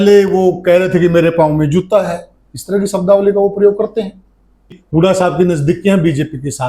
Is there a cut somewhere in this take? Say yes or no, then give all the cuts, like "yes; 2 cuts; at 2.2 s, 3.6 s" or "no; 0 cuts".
yes; 1 cut; at 4.8 s